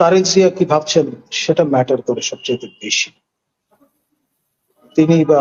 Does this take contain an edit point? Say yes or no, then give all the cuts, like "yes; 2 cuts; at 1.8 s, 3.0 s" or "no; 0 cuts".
no; 0 cuts